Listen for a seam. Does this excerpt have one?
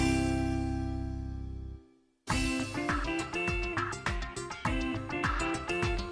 yes; 1 cut; at 2.6 s

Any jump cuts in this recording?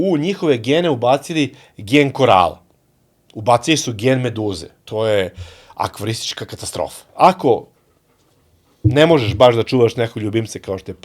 yes; 2 cuts; at 4.7 s, 7.0 s

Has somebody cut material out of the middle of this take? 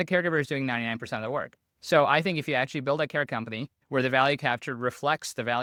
no; 0 cuts

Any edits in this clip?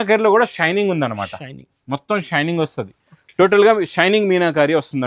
no; 0 cuts

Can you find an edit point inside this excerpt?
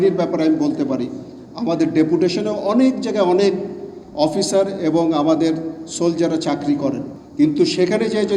yes; 1 cut; at 7.2 s

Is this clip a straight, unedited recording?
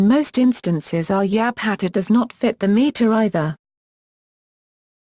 no; 1 cut; at 3.1 s

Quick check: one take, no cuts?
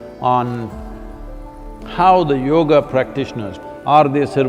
no; 1 cut; at 3.4 s

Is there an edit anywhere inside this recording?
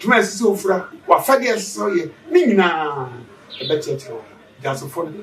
yes; 1 cut; at 0.9 s

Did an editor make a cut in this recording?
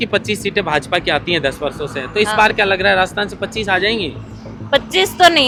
no; 0 cuts

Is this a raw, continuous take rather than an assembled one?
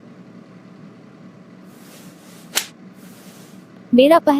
no; 1 cut; at 1.3 s

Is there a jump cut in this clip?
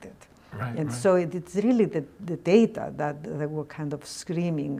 no; 0 cuts

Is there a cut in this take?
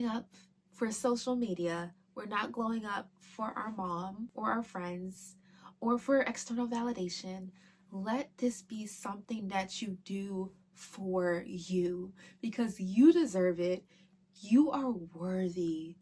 yes; 1 cut; at 4.3 s

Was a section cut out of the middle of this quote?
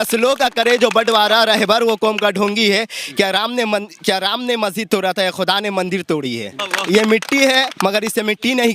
yes; 1 cut; at 6.6 s

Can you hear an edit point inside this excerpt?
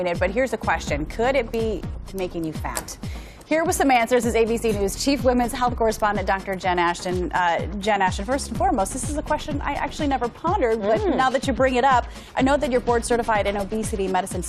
no; 0 cuts

